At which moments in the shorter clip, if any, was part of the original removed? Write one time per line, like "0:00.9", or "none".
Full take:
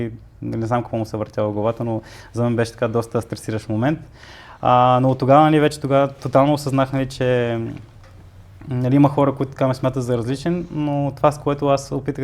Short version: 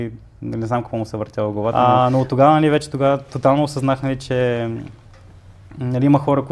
0:01.7